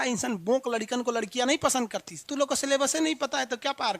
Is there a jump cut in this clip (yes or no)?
yes